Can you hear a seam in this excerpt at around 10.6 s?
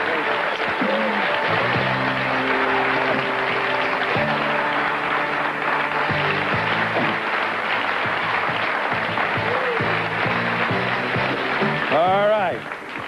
no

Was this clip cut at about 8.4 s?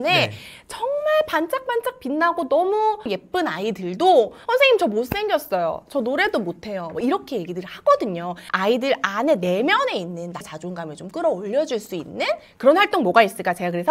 yes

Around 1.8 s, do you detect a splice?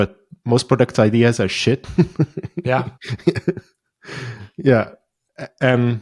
no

